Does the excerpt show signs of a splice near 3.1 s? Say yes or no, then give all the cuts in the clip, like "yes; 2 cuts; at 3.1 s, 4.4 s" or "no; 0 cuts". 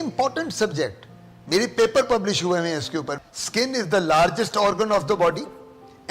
yes; 1 cut; at 3.1 s